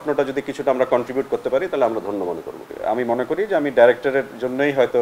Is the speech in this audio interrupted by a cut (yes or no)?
yes